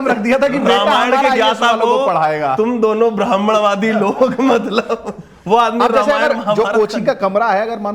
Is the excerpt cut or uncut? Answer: uncut